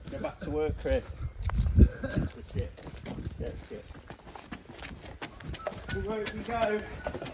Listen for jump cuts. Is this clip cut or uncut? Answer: uncut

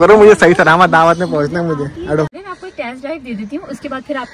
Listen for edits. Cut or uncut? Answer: cut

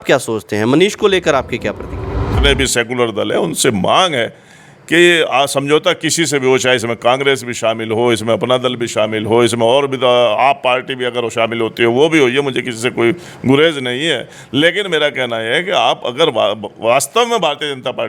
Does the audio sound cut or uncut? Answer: cut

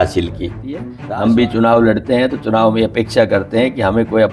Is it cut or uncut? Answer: cut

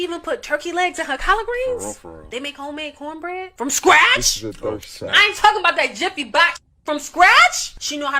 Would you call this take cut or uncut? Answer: uncut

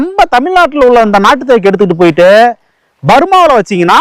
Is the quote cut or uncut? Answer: uncut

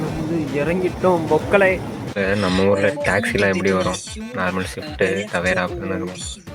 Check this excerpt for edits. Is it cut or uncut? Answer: cut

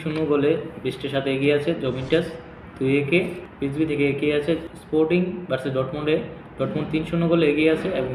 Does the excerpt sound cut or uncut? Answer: cut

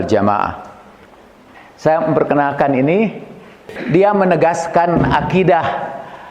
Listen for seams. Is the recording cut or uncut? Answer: cut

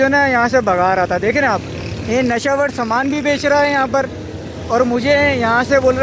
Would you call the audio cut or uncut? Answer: uncut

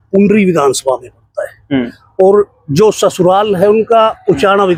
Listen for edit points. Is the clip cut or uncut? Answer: uncut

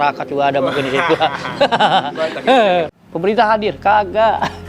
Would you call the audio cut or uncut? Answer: cut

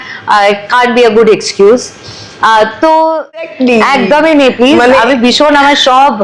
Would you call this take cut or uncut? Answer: cut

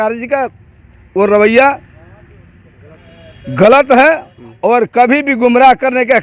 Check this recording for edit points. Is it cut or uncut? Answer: uncut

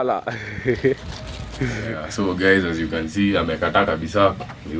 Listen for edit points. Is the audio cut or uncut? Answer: cut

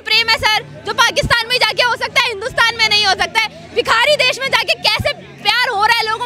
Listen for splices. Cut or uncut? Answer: uncut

